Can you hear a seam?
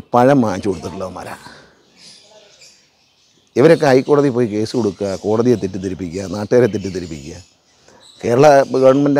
no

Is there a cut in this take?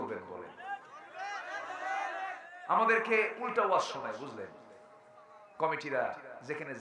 no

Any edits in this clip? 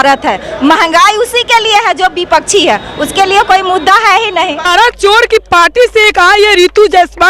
yes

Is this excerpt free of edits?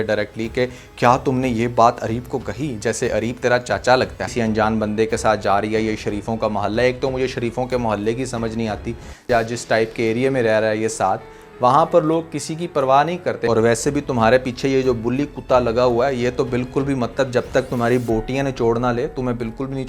no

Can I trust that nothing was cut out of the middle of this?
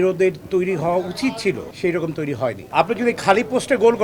no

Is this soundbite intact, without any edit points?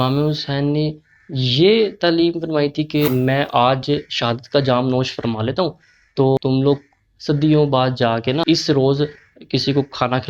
no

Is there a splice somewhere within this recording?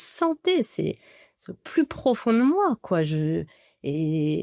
no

